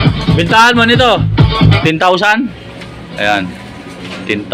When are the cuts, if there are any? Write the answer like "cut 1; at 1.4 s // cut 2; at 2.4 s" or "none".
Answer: cut 1; at 1.8 s